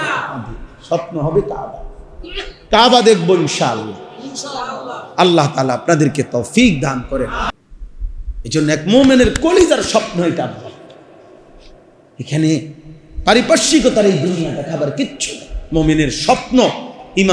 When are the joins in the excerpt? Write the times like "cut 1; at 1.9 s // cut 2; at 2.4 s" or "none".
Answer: cut 1; at 7.5 s